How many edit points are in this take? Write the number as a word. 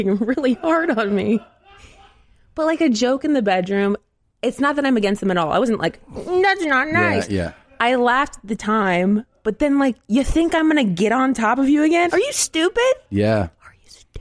one